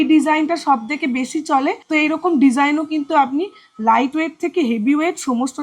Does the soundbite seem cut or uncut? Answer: cut